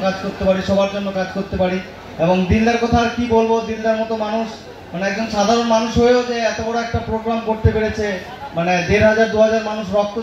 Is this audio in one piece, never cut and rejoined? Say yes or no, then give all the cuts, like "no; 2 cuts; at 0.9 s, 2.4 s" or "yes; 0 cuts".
yes; 0 cuts